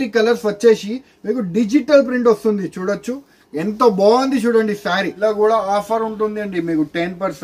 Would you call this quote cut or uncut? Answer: cut